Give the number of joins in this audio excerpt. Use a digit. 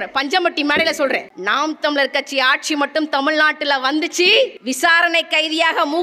2